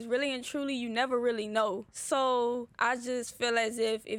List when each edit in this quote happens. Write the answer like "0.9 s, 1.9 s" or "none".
1.9 s, 2.7 s